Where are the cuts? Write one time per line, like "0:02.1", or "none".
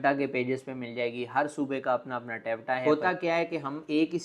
0:02.8